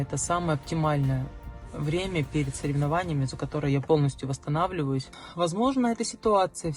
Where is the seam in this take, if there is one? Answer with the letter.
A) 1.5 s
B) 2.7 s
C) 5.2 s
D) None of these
C